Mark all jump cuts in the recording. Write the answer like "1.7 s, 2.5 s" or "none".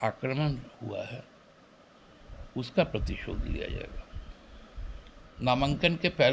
5.3 s